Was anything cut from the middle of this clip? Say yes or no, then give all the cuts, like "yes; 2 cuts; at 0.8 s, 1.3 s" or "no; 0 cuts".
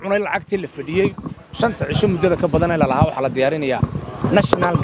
no; 0 cuts